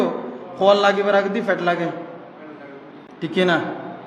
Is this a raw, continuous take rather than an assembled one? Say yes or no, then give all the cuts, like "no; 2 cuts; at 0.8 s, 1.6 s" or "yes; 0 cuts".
yes; 0 cuts